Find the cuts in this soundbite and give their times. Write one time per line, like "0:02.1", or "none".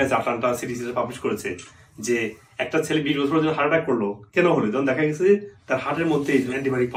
none